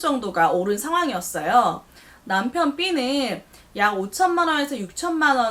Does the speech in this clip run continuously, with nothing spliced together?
yes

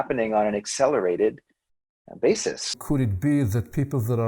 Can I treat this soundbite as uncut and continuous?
no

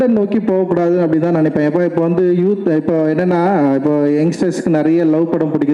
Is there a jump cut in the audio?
no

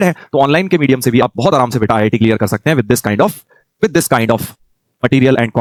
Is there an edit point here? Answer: no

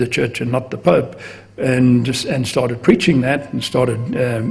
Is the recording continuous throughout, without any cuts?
yes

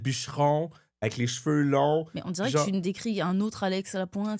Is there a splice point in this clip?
no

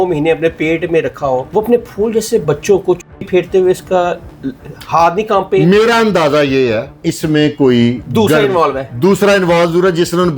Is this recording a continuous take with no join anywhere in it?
no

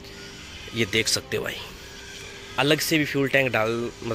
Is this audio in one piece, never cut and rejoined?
yes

